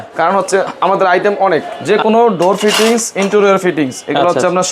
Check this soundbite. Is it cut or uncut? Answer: cut